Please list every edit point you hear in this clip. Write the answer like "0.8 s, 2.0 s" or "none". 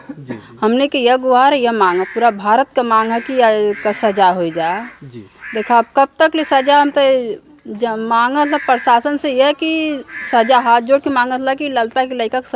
none